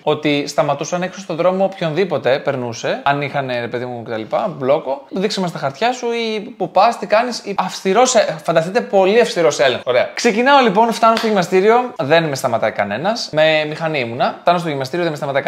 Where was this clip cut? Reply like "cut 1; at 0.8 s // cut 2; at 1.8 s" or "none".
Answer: none